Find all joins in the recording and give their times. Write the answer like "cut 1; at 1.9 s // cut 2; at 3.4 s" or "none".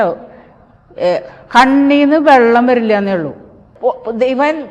cut 1; at 3.7 s